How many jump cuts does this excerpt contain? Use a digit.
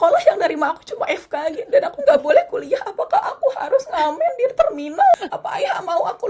1